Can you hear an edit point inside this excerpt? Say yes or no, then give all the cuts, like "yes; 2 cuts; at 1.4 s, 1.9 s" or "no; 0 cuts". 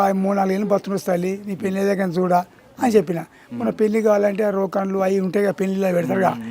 no; 0 cuts